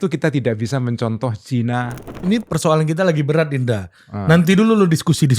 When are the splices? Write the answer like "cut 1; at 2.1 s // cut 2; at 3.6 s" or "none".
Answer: cut 1; at 2.0 s